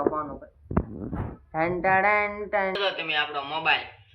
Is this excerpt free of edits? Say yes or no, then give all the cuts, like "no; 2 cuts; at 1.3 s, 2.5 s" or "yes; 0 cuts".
no; 1 cut; at 2.8 s